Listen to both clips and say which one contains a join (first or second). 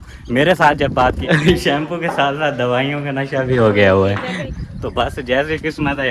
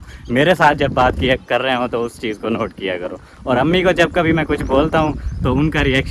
first